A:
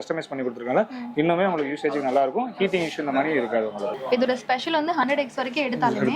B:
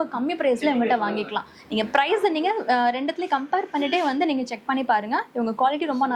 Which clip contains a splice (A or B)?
A